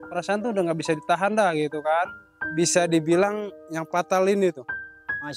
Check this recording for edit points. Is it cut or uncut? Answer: cut